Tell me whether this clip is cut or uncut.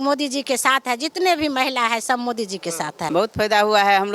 cut